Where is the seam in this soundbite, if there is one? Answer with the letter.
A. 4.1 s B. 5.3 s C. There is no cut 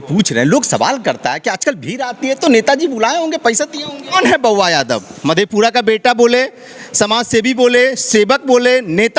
A